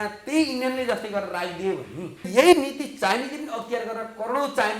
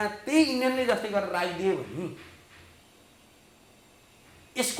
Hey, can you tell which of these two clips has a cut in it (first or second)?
first